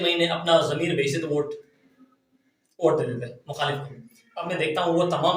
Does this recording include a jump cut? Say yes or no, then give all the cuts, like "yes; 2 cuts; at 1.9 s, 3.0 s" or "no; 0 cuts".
no; 0 cuts